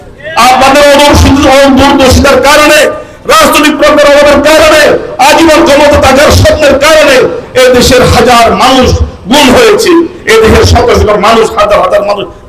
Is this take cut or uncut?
uncut